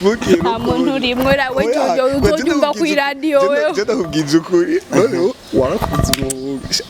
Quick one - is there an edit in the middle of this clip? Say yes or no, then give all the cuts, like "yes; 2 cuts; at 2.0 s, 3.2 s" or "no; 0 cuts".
no; 0 cuts